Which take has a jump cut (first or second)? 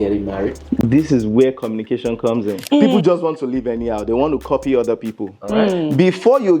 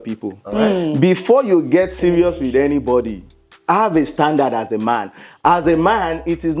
first